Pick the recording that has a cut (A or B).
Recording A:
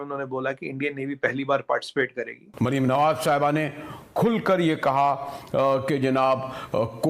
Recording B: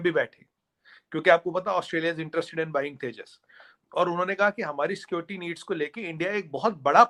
A